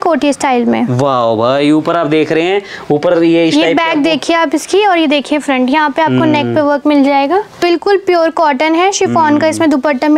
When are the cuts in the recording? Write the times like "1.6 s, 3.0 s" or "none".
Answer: 7.6 s